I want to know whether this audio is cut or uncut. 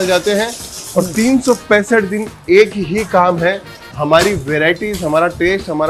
uncut